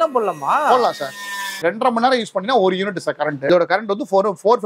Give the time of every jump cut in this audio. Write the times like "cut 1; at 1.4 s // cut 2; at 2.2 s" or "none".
cut 1; at 1.6 s // cut 2; at 3.4 s